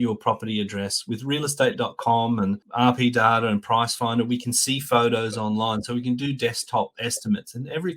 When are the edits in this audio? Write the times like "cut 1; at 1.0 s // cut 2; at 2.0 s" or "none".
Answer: cut 1; at 2.6 s